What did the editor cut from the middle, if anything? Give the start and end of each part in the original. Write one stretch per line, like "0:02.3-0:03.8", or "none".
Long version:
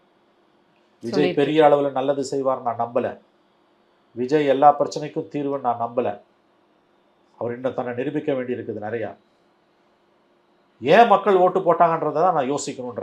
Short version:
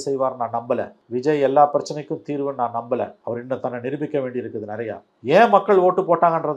0:03.2-0:04.0
0:06.2-0:07.3
0:09.2-0:10.7